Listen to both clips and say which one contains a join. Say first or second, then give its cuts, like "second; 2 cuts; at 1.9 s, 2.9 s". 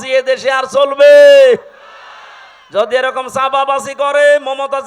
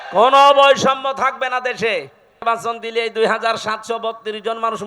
second; 1 cut; at 2.4 s